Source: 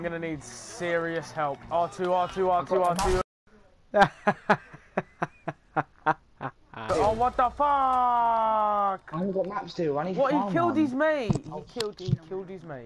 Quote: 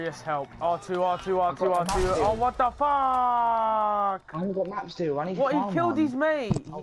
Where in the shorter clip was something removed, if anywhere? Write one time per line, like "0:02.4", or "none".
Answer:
0:02.1